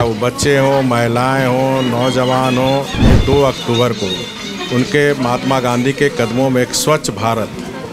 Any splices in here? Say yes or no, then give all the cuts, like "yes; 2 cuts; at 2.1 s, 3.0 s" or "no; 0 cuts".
yes; 1 cut; at 3.2 s